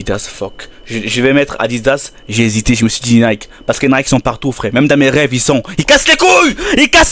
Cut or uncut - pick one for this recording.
uncut